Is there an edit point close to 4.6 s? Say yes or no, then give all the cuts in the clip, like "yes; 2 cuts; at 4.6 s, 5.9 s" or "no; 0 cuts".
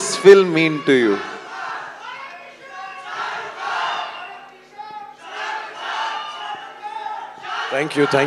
no; 0 cuts